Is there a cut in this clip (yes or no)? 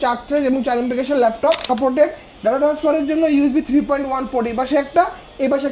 yes